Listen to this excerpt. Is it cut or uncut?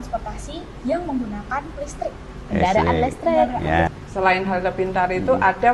cut